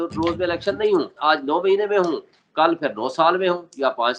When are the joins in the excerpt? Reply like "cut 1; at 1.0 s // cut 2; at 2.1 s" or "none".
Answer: cut 1; at 1.1 s

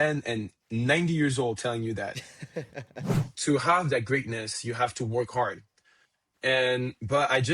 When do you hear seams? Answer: cut 1; at 3.2 s

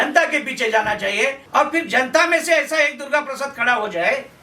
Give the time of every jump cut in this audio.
cut 1; at 1.4 s

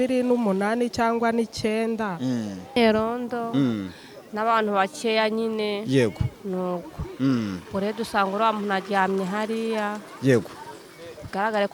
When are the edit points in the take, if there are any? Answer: cut 1; at 2.8 s

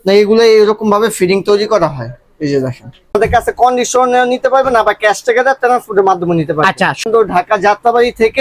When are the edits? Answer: cut 1; at 3.2 s // cut 2; at 7.0 s

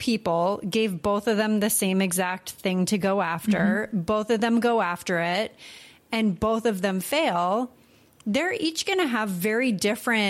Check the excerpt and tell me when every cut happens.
none

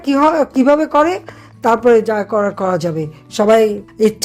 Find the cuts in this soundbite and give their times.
none

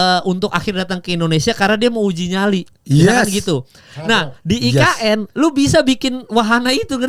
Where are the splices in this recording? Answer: none

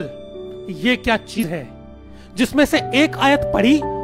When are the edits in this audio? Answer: cut 1; at 1.4 s

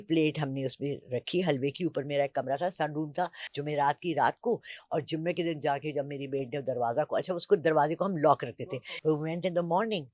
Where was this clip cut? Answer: cut 1; at 3.4 s // cut 2; at 8.5 s

